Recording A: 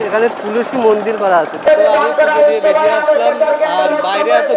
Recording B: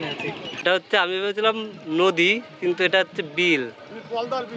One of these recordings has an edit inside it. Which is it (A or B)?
A